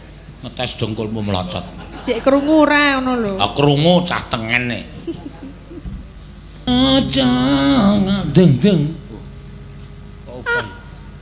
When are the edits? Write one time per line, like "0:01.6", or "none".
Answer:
0:06.7